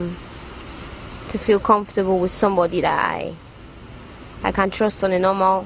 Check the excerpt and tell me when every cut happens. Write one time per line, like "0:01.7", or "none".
0:02.2